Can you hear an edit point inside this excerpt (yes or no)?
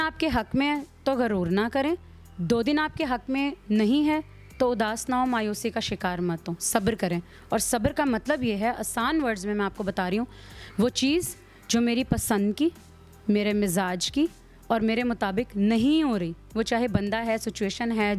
no